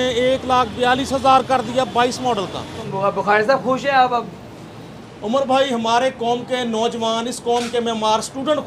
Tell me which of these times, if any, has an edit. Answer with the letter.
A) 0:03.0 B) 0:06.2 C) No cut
A